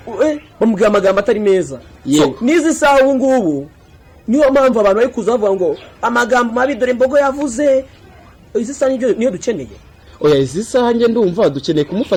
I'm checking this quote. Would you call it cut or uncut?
uncut